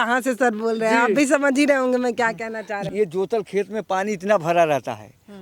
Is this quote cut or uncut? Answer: cut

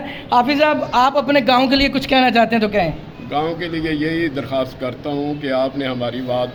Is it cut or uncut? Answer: uncut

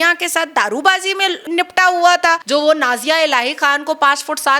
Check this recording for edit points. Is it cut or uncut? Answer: cut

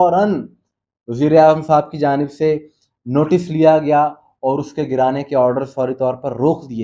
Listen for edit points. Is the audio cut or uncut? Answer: uncut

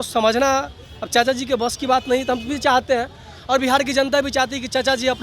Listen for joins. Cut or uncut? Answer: uncut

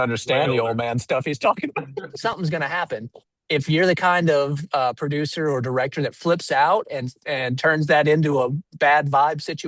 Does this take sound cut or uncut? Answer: cut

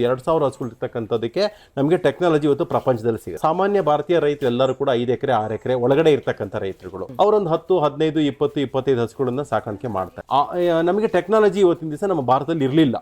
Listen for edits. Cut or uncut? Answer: cut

